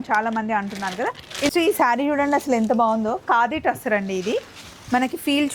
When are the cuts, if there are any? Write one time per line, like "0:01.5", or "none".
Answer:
0:01.5